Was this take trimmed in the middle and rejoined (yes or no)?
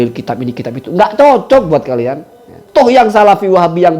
yes